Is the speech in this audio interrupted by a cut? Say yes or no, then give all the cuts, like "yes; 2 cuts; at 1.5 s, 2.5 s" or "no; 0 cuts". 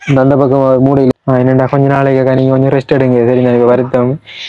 yes; 1 cut; at 1.1 s